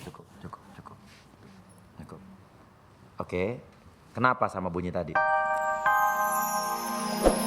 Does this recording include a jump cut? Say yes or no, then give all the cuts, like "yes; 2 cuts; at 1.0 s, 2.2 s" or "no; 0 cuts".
yes; 1 cut; at 5.1 s